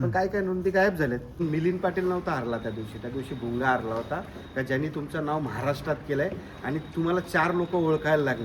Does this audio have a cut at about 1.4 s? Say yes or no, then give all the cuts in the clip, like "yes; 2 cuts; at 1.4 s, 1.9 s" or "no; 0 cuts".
yes; 1 cut; at 1.4 s